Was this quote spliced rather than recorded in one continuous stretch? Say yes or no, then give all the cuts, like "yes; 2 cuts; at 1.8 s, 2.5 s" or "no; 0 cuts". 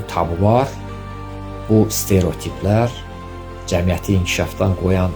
no; 0 cuts